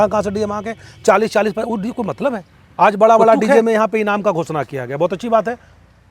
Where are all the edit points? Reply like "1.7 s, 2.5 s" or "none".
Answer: 2.6 s